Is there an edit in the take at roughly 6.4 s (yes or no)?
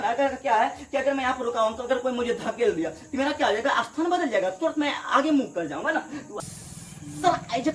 yes